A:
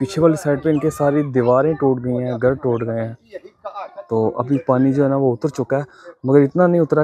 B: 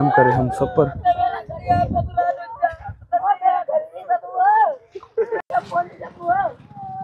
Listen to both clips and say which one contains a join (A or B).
B